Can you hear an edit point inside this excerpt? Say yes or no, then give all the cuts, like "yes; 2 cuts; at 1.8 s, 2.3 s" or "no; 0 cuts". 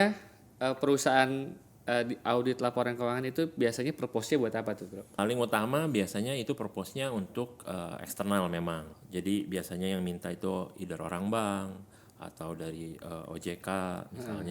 yes; 2 cuts; at 5.1 s, 8.9 s